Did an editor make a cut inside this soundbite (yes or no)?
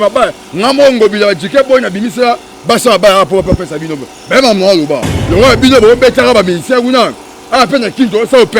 yes